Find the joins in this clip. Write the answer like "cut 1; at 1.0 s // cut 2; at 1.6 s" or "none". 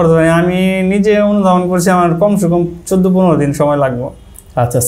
none